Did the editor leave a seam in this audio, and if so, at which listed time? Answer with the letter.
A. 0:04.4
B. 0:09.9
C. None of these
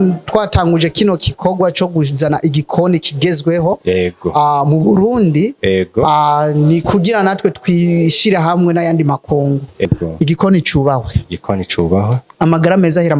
B